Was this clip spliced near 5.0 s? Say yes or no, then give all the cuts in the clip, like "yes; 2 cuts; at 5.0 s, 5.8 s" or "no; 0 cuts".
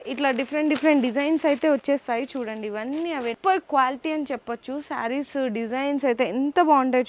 no; 1 cut; at 3.4 s